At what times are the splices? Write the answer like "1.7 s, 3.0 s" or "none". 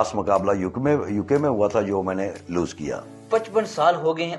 3.1 s